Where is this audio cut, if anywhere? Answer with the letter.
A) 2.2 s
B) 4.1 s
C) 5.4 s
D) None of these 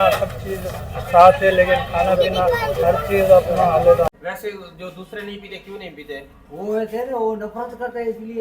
B